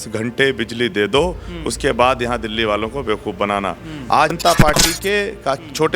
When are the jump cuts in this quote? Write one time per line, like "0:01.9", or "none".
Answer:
0:04.4